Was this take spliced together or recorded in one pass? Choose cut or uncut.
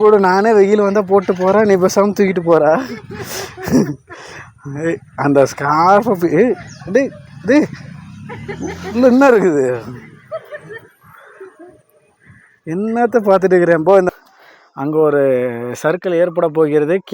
cut